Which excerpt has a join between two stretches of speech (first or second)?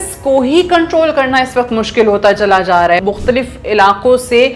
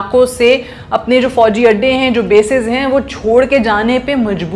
first